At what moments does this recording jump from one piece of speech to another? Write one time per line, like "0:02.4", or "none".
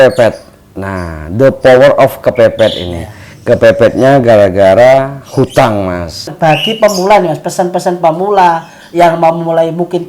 0:06.3